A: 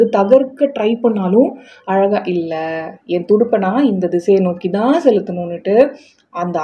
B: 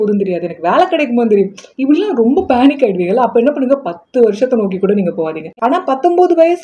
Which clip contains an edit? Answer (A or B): B